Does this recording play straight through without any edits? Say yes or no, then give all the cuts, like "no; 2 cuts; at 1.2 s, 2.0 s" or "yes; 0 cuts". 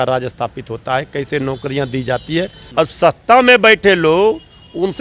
no; 1 cut; at 2.6 s